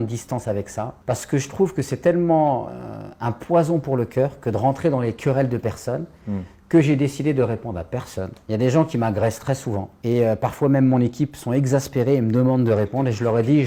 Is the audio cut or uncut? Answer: uncut